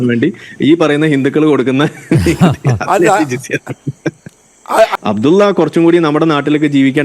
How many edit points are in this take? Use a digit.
1